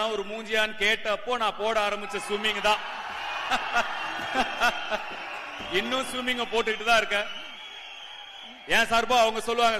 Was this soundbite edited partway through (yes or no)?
no